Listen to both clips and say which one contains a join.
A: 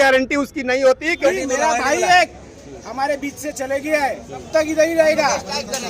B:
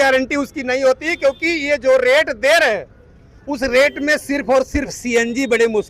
A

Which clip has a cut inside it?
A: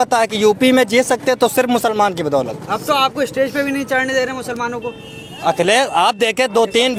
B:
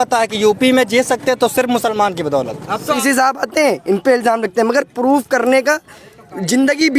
B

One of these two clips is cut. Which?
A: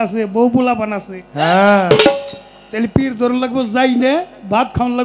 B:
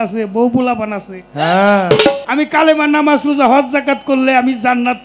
B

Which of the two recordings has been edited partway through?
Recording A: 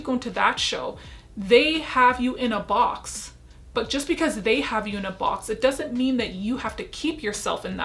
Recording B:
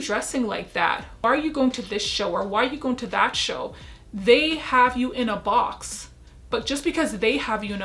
B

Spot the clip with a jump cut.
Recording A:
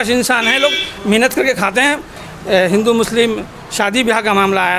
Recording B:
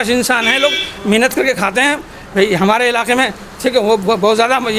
A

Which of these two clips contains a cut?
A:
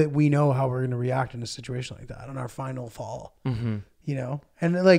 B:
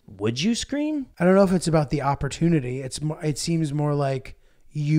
B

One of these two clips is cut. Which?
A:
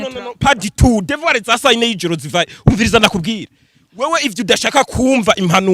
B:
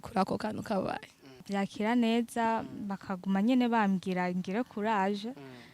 B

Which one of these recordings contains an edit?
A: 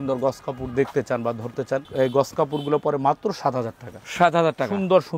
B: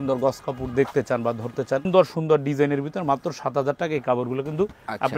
B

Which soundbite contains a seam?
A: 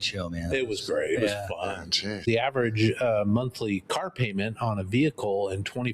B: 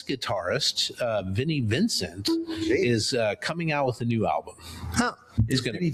A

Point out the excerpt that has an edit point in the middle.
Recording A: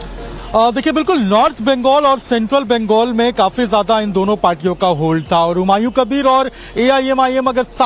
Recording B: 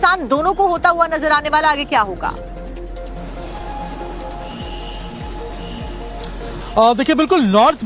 A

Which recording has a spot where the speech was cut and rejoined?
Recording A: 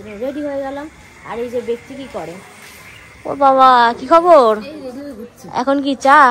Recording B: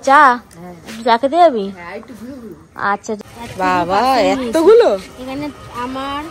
B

